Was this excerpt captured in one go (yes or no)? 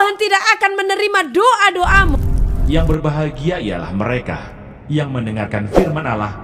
no